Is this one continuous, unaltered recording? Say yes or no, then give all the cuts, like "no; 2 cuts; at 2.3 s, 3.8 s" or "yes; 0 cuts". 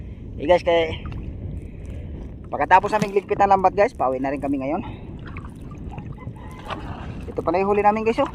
yes; 0 cuts